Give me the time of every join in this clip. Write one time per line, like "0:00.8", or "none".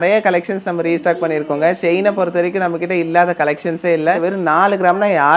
0:04.2